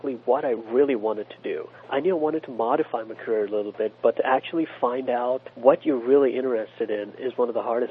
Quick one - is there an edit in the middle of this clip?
yes; 2 cuts; at 1.7 s, 5.5 s

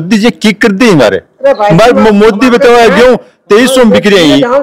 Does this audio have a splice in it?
no; 0 cuts

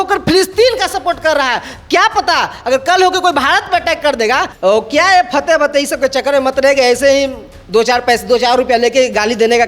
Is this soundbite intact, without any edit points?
no; 1 cut; at 4.5 s

